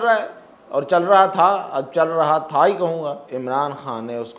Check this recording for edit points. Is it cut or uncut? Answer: cut